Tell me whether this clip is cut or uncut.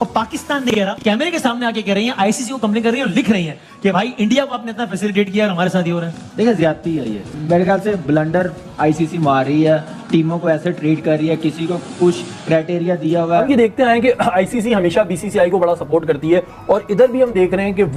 cut